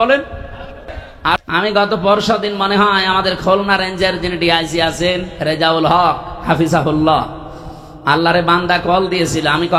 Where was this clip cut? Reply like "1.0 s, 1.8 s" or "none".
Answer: 1.4 s